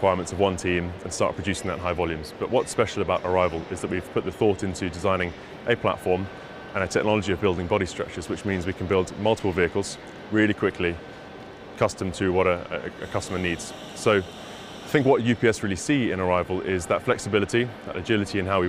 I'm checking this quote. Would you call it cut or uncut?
uncut